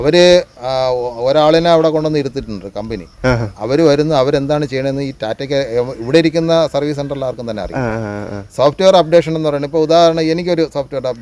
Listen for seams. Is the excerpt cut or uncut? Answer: uncut